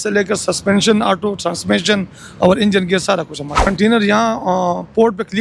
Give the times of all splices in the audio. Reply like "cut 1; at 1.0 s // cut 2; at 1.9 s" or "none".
cut 1; at 3.6 s